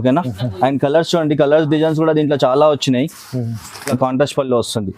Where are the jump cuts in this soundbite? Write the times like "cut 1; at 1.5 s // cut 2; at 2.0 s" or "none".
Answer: cut 1; at 3.9 s